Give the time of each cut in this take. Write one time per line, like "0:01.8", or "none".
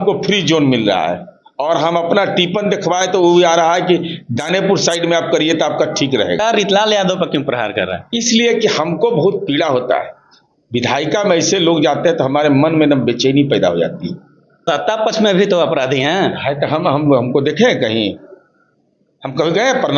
0:06.4
0:14.5